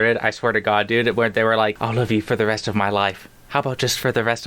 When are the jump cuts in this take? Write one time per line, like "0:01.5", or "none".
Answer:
0:01.8